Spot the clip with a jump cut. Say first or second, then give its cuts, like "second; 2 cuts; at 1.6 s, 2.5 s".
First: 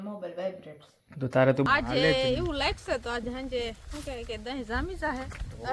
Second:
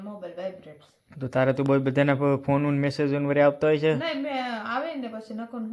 first; 1 cut; at 1.7 s